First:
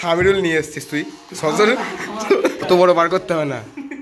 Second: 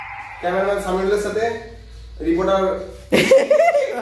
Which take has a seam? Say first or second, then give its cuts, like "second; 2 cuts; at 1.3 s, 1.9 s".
first; 1 cut; at 2.7 s